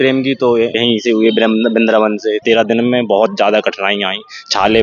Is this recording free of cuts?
no; 2 cuts; at 0.8 s, 2.4 s

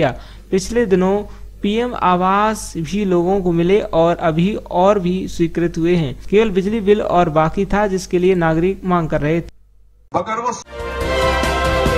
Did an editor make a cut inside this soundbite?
yes; 1 cut; at 10.6 s

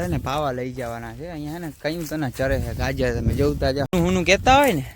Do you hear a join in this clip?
yes; 1 cut; at 3.9 s

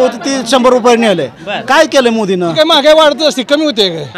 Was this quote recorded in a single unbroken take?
no; 1 cut; at 2.5 s

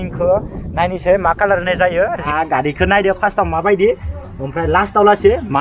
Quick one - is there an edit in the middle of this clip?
yes; 1 cut; at 2.2 s

